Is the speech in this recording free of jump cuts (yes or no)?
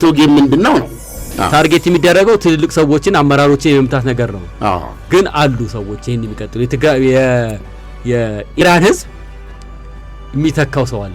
no